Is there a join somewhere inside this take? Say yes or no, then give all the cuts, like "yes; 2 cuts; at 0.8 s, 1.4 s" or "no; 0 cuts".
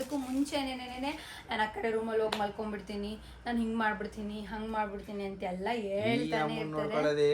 no; 0 cuts